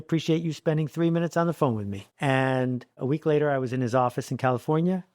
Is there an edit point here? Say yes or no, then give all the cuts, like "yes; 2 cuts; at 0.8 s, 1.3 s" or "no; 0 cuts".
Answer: yes; 1 cut; at 3.0 s